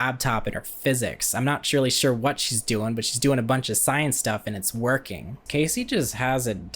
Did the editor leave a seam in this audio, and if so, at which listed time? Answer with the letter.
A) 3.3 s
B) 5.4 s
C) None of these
B